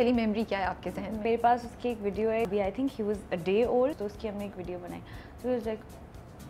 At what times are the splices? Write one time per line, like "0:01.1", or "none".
0:01.2
0:02.5
0:04.1